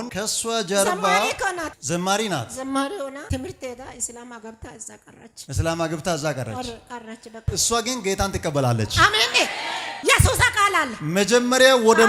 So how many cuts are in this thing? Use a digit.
0